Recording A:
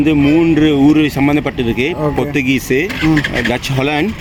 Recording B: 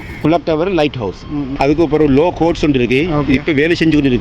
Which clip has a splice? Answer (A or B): B